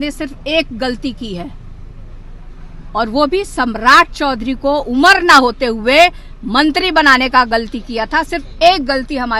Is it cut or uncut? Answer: uncut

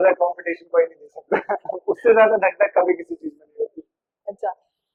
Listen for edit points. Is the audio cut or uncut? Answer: uncut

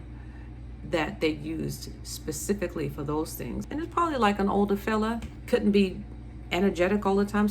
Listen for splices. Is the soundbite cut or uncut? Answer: cut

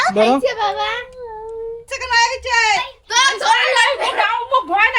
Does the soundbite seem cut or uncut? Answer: cut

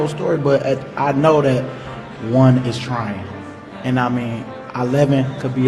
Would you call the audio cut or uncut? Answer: uncut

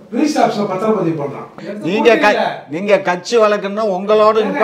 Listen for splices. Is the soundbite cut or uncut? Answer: cut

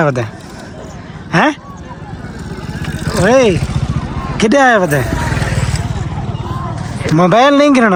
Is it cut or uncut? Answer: uncut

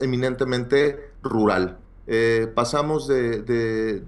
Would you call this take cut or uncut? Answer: uncut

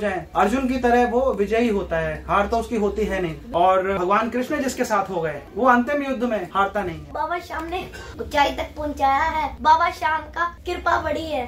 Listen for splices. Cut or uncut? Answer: cut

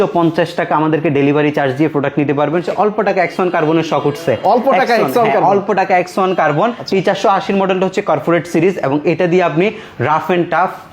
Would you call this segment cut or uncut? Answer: cut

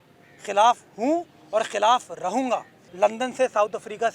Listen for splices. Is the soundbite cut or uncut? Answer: cut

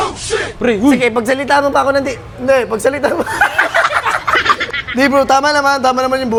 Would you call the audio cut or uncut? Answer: uncut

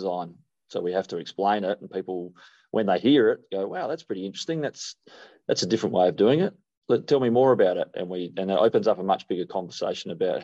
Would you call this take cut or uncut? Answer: uncut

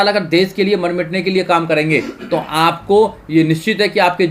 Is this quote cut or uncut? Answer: uncut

